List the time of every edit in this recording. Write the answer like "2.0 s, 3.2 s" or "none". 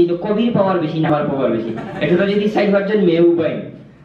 1.1 s